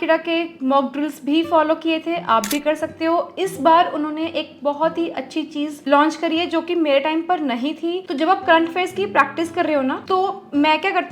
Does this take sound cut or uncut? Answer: uncut